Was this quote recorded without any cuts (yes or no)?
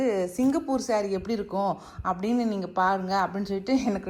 yes